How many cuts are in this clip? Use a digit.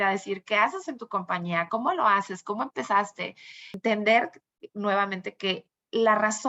1